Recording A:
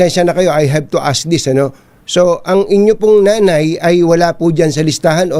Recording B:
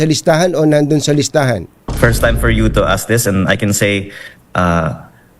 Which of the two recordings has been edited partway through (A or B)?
B